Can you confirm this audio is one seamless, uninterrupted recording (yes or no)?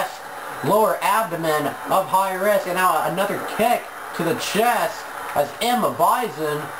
yes